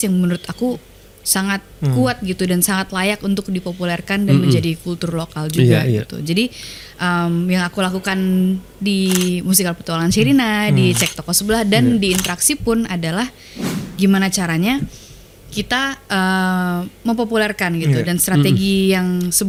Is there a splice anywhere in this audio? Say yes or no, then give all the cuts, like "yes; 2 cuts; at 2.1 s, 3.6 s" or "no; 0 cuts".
no; 0 cuts